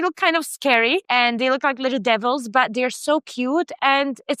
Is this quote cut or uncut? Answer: uncut